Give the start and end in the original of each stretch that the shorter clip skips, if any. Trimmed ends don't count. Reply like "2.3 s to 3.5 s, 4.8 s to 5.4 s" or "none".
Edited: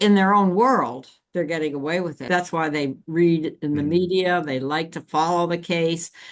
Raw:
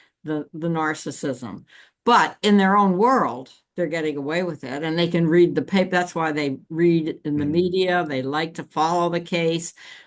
4.7 s to 5.9 s